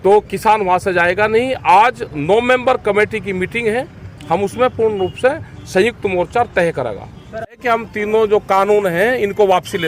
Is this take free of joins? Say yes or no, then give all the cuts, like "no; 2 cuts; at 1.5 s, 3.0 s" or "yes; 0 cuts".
no; 1 cut; at 6.9 s